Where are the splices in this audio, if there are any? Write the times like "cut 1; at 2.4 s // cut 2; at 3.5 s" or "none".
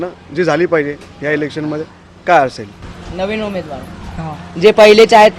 none